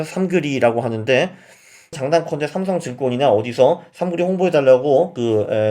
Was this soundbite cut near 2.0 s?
yes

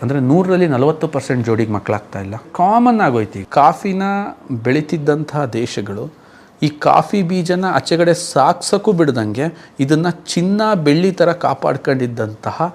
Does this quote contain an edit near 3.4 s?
yes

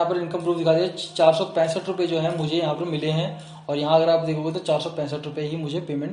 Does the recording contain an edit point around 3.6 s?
no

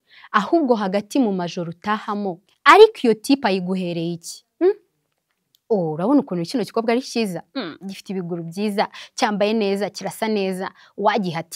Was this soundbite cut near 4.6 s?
no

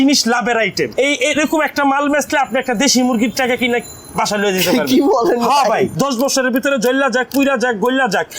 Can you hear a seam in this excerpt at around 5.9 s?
yes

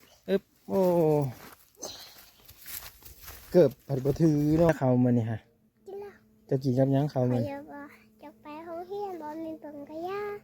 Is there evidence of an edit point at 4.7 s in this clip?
yes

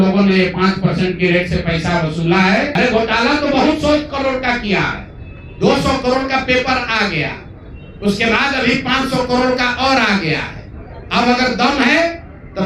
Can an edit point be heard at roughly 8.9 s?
no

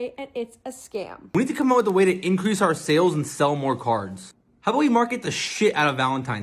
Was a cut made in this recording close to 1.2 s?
yes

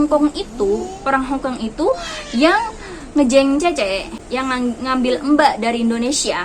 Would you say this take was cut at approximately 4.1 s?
yes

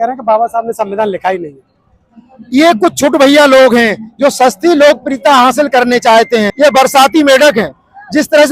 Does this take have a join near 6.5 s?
yes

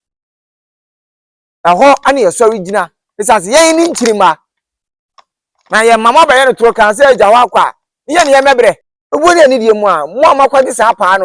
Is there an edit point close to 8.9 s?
yes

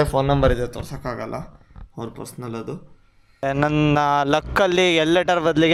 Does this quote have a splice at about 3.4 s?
yes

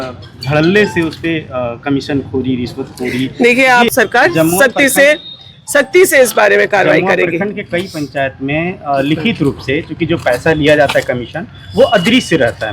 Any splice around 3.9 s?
yes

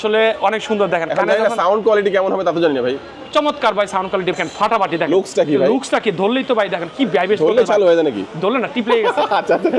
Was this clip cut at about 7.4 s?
no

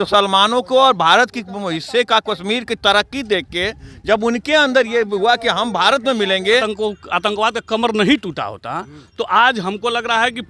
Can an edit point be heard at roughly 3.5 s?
no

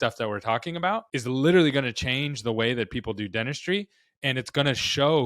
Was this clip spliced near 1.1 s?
yes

